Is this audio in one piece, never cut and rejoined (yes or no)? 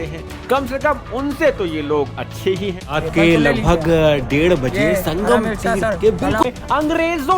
no